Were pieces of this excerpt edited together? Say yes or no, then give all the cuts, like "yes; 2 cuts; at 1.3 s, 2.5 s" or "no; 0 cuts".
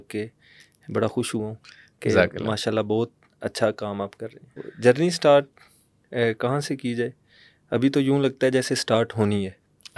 yes; 1 cut; at 4.6 s